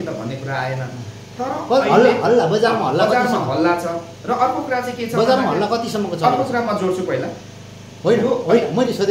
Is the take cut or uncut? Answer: uncut